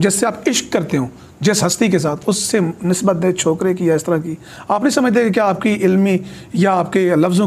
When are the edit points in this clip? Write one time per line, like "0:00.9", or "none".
none